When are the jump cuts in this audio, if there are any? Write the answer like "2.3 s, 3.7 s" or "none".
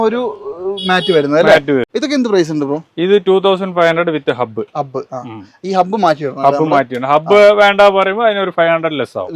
1.9 s